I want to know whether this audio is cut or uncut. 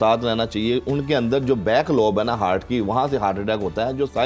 uncut